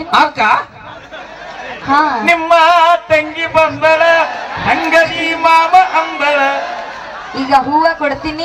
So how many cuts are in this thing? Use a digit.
0